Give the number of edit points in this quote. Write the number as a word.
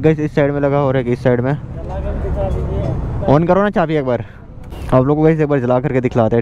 zero